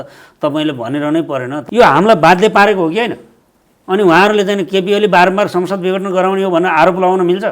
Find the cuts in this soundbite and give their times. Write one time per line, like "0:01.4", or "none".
0:01.6